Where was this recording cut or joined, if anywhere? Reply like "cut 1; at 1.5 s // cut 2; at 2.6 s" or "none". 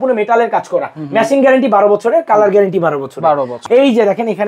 cut 1; at 3.6 s